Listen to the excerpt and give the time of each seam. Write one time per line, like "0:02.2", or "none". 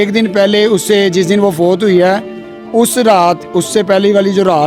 none